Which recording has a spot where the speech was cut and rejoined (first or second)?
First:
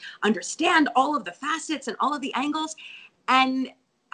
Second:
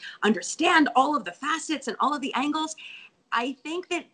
second